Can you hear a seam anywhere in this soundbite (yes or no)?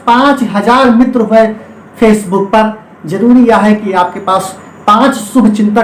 no